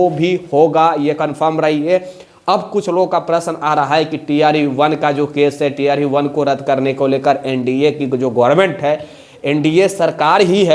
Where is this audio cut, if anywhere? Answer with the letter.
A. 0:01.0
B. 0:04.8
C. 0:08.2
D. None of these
D